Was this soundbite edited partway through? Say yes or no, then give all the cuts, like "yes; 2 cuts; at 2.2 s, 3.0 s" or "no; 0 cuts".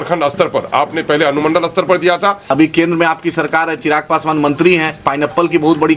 yes; 1 cut; at 2.5 s